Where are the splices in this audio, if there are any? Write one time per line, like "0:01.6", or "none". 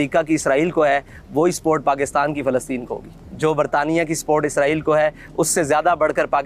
none